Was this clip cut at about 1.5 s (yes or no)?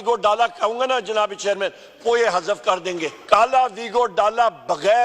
no